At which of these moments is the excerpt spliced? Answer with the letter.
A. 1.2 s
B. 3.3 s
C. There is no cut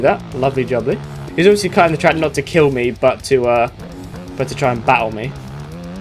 A